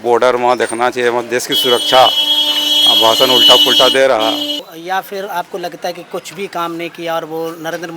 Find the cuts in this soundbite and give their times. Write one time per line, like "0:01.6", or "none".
0:04.6